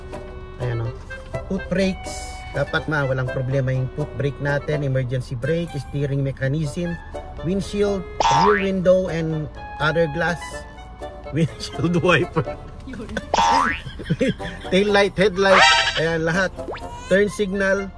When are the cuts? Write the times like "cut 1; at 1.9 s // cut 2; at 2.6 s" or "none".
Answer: cut 1; at 1.4 s // cut 2; at 2.9 s